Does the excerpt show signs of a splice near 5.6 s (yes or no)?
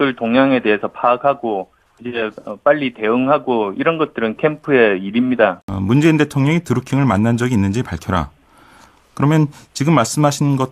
yes